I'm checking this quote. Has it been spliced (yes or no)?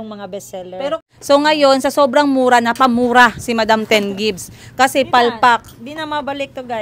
yes